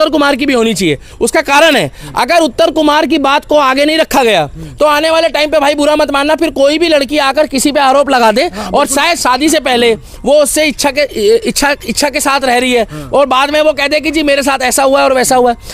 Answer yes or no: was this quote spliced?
no